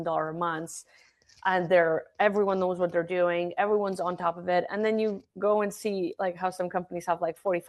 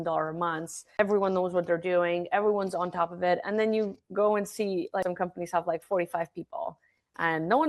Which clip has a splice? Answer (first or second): second